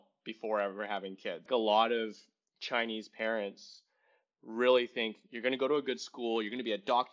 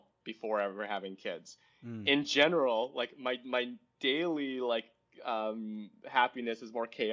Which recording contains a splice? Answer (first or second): first